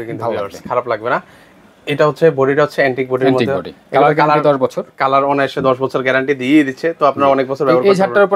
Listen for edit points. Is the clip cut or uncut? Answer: uncut